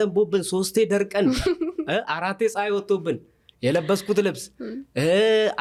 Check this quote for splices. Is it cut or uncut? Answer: uncut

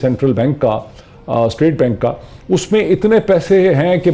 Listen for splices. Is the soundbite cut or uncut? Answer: uncut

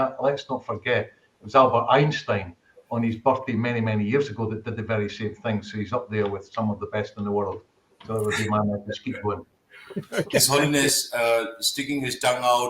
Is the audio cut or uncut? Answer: cut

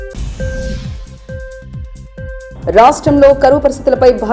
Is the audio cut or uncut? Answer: cut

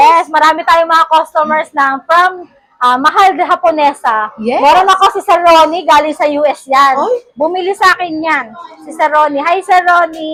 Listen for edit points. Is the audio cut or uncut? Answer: uncut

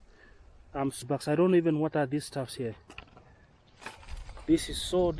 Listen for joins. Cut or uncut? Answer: cut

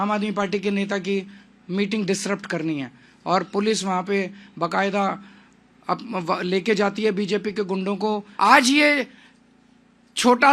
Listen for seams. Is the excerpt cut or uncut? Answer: cut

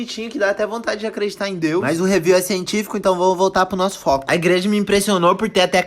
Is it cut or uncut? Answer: cut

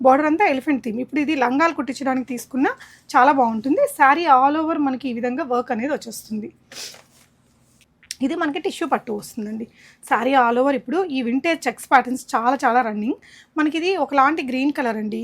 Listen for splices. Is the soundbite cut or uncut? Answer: uncut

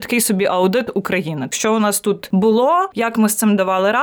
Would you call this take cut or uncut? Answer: cut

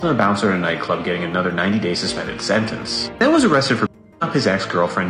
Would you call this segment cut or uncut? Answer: uncut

